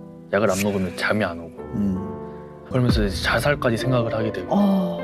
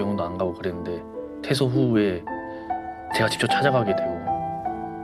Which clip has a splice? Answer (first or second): first